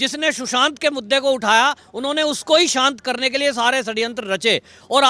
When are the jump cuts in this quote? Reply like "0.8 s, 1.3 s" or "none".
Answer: none